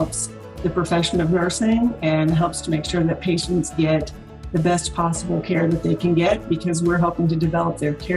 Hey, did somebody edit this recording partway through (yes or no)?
no